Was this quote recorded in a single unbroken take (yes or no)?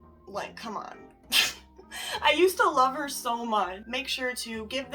no